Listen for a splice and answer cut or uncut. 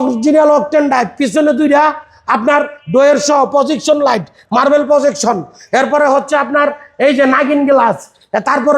uncut